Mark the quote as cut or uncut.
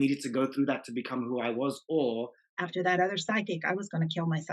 cut